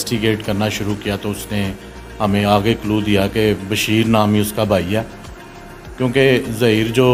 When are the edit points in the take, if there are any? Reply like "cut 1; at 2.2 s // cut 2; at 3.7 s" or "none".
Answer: none

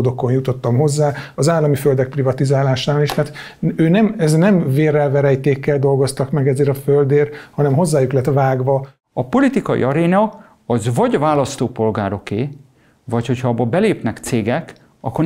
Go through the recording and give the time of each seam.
cut 1; at 9.0 s

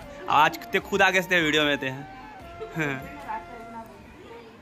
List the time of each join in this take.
none

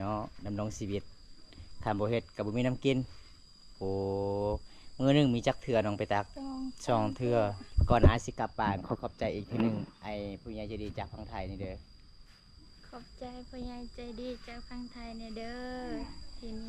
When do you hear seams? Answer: cut 1; at 6.4 s // cut 2; at 7.7 s

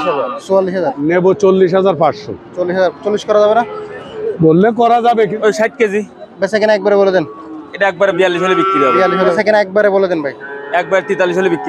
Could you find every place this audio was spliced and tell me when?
cut 1; at 1.0 s // cut 2; at 5.3 s // cut 3; at 9.3 s

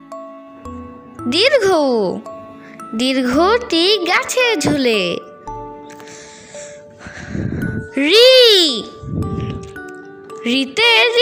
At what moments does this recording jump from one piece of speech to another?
cut 1; at 1.2 s

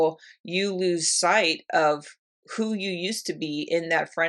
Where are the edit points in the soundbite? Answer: none

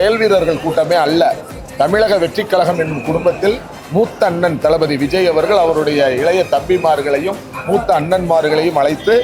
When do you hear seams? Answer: none

